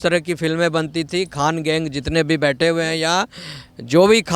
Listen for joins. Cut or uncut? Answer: uncut